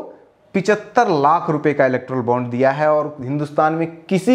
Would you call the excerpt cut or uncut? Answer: uncut